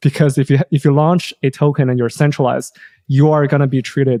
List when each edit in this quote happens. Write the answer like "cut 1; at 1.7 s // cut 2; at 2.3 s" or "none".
none